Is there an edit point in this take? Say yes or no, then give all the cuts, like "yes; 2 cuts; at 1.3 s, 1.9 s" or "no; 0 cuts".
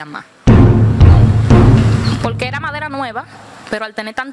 no; 0 cuts